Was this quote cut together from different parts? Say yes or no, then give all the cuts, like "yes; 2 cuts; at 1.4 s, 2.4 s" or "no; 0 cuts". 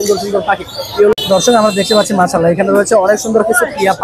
yes; 1 cut; at 1.1 s